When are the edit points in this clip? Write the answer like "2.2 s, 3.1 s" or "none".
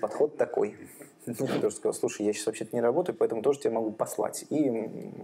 1.6 s

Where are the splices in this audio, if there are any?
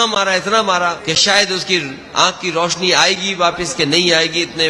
1.0 s

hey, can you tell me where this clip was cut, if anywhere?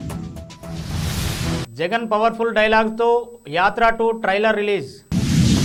none

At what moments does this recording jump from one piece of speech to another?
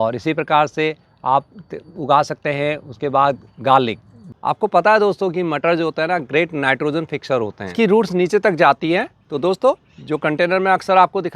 4.3 s, 7.7 s

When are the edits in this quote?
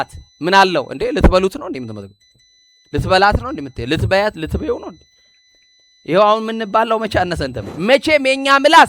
7.7 s

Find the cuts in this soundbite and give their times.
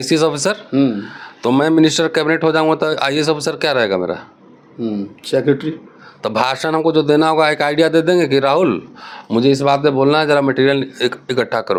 none

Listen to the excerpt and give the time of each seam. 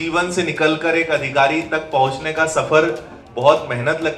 3.3 s

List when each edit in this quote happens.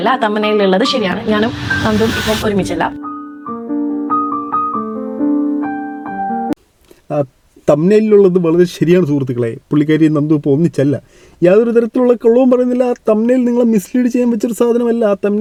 none

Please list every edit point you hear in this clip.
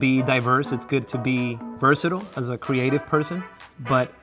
2.4 s

